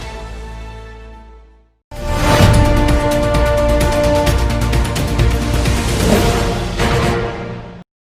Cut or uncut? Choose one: cut